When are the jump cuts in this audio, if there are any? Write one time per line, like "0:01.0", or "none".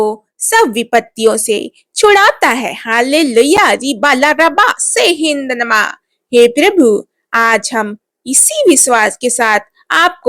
none